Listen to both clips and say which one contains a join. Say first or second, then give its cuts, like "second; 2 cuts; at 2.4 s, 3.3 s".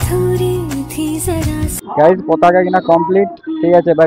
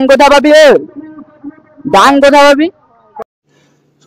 first; 1 cut; at 1.8 s